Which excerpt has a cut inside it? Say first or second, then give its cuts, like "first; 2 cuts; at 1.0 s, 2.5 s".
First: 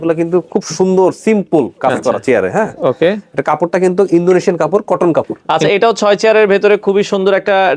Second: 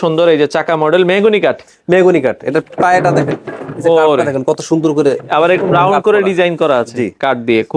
first; 1 cut; at 5.4 s